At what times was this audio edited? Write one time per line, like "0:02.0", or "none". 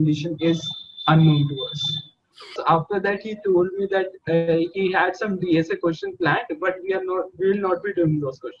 0:02.6